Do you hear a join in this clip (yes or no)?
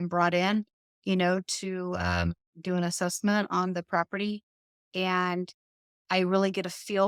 no